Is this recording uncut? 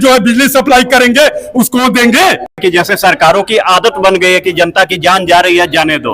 no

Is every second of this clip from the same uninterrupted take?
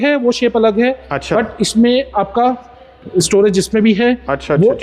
yes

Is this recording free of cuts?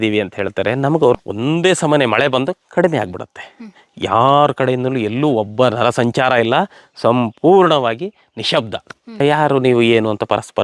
no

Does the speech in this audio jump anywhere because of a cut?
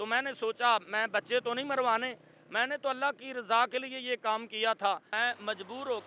yes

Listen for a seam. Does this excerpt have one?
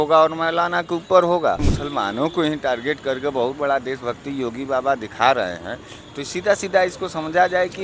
yes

